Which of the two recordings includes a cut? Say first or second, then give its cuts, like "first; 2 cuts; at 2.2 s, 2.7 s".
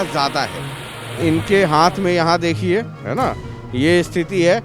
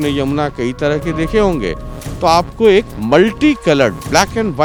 first; 1 cut; at 1.2 s